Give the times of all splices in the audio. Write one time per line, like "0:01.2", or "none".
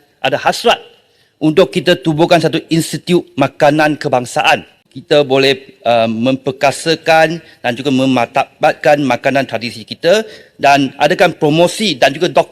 0:04.9